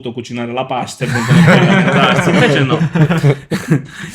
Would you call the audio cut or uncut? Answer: uncut